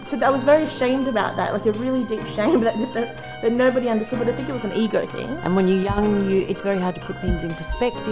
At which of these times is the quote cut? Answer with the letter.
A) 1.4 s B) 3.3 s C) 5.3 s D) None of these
C